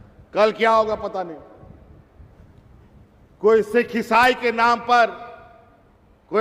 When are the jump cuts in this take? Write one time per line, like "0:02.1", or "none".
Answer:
0:02.4